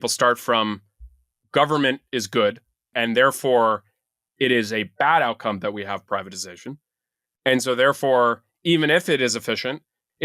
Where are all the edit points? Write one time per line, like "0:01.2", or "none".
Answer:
0:02.9
0:06.0

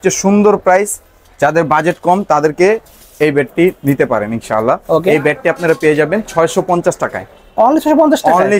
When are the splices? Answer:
none

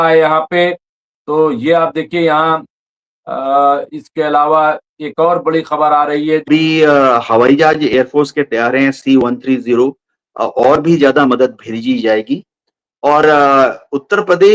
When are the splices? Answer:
0:06.5

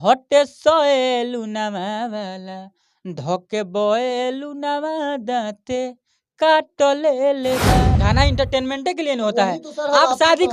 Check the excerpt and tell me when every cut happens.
0:07.9

